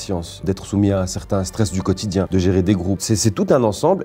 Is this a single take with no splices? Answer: no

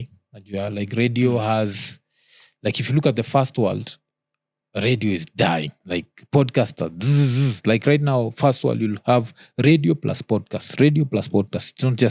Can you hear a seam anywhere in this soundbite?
no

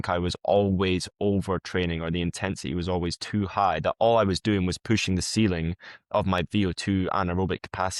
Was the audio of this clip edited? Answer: no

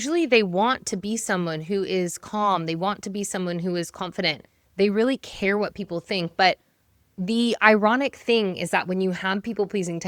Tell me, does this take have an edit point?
no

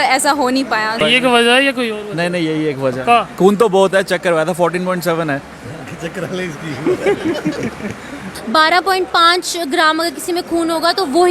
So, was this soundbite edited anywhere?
yes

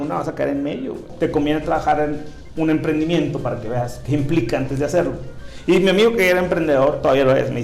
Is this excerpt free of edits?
no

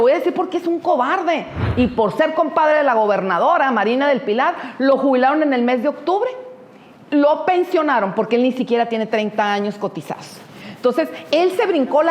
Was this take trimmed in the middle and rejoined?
yes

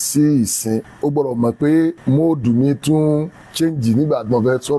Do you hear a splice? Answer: yes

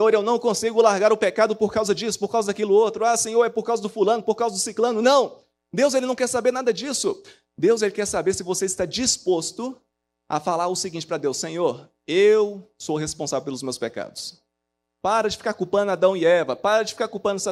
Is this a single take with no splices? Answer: yes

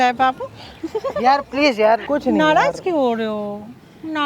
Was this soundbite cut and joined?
yes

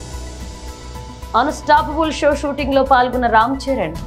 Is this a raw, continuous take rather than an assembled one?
no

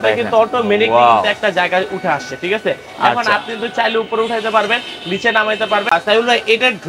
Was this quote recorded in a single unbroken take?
yes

